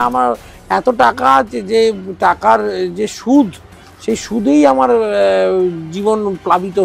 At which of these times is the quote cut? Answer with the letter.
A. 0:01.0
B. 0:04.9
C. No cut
C